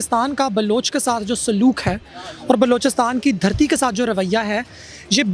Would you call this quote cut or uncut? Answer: uncut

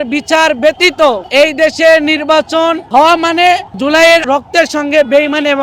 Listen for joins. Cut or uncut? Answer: cut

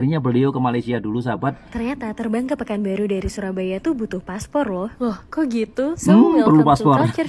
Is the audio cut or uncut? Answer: cut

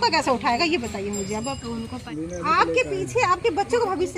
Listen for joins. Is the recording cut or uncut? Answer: cut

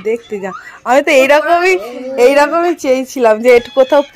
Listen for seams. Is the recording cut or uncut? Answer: uncut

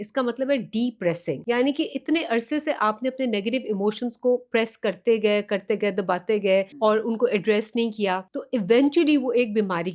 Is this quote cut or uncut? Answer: cut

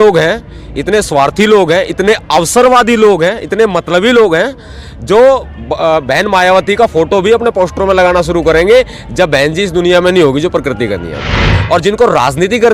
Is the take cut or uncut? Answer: cut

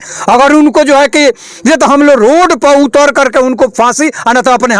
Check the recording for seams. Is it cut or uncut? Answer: uncut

